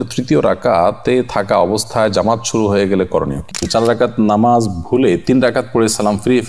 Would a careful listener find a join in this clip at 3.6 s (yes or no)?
yes